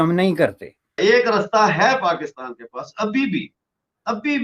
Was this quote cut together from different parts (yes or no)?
yes